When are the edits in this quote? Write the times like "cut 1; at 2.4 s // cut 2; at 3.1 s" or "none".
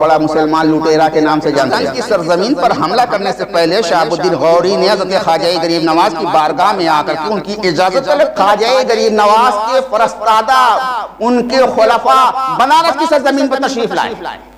cut 1; at 1.8 s // cut 2; at 8.3 s

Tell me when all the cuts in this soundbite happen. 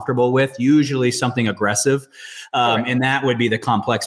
none

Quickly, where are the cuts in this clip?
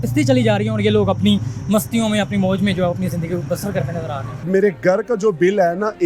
cut 1; at 4.5 s

